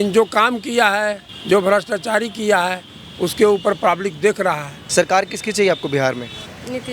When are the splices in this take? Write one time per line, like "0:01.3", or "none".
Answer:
0:01.3
0:04.7